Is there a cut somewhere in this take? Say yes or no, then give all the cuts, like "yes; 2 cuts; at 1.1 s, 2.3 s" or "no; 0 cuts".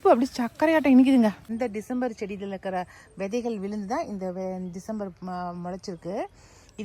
yes; 1 cut; at 1.5 s